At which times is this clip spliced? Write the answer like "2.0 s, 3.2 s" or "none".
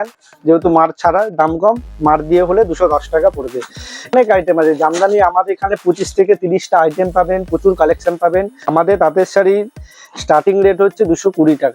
4.1 s, 8.7 s